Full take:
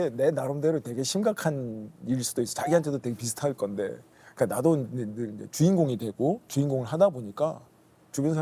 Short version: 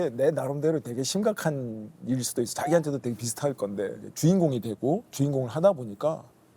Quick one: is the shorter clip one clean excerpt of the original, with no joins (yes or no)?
no